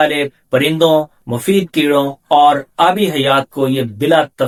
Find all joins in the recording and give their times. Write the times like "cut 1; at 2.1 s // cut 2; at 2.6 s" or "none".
none